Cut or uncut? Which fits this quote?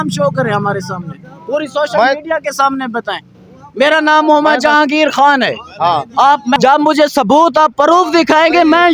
cut